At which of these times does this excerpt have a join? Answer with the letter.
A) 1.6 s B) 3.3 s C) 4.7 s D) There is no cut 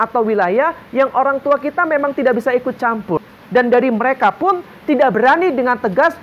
B